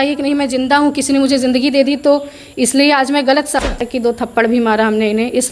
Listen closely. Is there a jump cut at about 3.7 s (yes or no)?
yes